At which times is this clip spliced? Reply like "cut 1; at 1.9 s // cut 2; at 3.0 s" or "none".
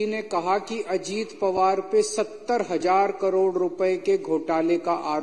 none